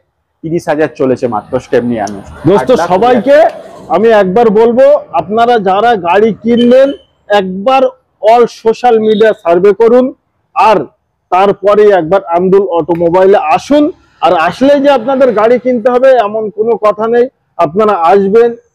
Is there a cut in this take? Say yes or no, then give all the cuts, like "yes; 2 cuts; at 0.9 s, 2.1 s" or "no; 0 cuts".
no; 0 cuts